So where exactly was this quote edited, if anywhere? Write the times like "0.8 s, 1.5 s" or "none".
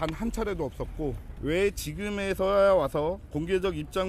1.3 s